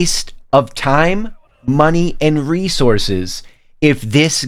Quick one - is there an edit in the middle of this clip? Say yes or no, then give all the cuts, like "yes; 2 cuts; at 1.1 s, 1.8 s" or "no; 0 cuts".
no; 0 cuts